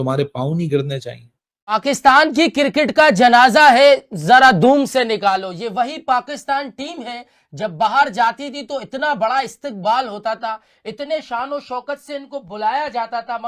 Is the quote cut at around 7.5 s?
no; 1 cut; at 1.5 s

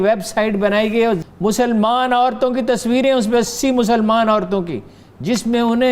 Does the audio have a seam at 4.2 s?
no; 1 cut; at 1.2 s

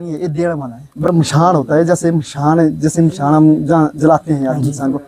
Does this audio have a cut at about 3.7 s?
no; 1 cut; at 1.1 s

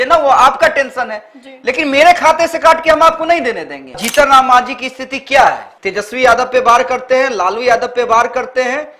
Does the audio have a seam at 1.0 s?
no; 1 cut; at 4.0 s

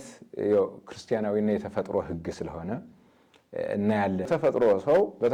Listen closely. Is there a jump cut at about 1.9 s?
no; 1 cut; at 4.3 s

